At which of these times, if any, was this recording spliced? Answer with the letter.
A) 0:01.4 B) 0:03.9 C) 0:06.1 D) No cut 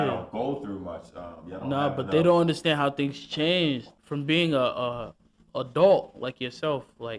B